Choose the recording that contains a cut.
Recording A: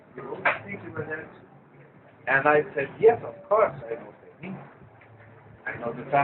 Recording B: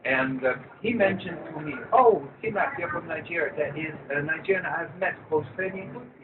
B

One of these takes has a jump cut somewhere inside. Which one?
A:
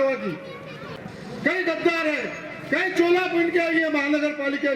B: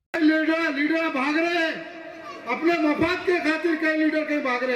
A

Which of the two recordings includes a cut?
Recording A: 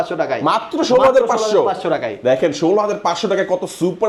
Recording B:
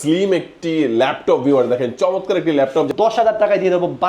B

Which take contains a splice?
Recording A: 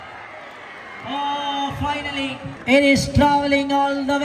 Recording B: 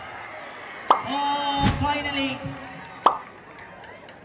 A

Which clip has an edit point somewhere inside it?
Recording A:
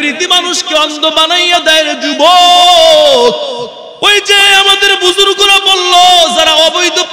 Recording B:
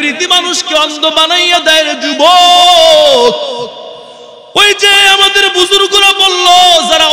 A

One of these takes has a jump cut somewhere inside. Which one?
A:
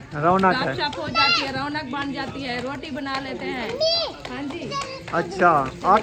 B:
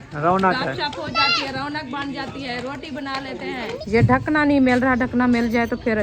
B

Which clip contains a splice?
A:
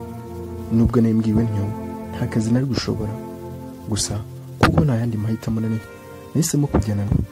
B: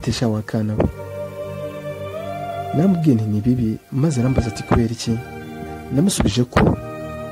B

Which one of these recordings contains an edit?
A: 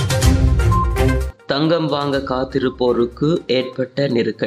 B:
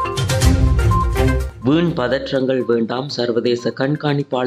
A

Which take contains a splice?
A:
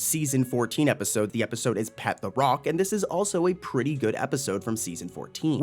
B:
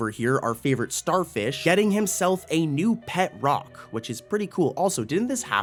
A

